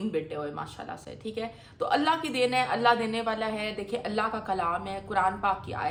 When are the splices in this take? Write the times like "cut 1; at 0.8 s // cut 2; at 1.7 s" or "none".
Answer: none